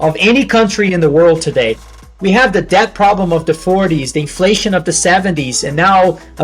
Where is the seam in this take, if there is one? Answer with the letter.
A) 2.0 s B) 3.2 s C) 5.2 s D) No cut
A